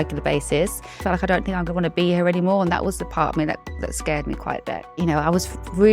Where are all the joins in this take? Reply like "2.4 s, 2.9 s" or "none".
1.0 s, 4.9 s